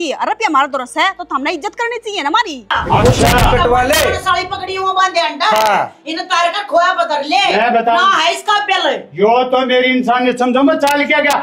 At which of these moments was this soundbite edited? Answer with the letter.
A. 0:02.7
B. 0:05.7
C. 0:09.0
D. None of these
A